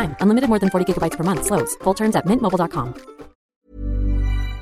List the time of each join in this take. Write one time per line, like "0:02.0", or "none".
0:03.6